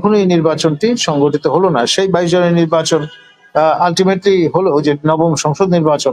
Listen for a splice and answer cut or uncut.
uncut